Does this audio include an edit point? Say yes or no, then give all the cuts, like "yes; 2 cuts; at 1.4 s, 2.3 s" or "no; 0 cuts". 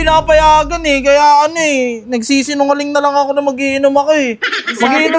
no; 0 cuts